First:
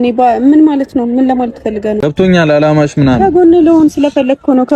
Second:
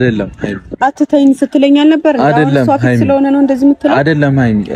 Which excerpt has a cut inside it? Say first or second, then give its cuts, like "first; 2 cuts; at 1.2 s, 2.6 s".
first; 1 cut; at 2.0 s